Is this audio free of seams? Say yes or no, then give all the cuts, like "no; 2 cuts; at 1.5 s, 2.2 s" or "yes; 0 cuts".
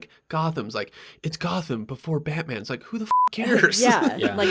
yes; 0 cuts